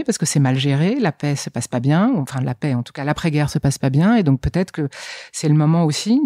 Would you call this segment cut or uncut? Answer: uncut